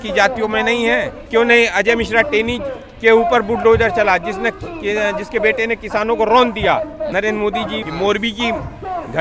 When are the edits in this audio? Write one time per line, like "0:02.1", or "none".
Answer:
0:01.2
0:07.5